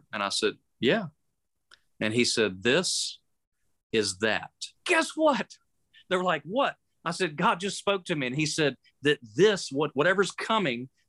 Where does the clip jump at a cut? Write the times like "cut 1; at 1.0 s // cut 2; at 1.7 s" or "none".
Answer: cut 1; at 4.7 s